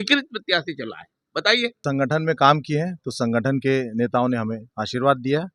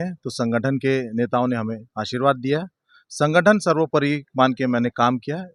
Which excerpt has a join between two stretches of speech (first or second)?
first